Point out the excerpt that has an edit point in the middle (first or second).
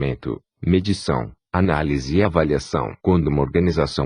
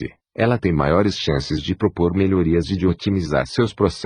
first